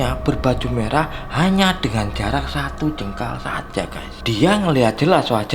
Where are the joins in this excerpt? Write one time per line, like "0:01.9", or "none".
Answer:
none